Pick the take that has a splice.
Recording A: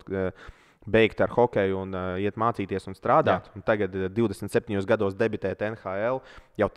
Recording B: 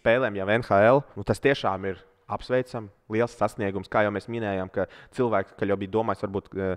B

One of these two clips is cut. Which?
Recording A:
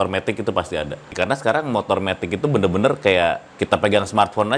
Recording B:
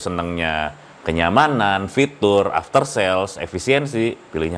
A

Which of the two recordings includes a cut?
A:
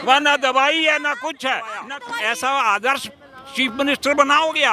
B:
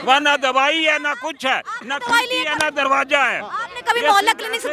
A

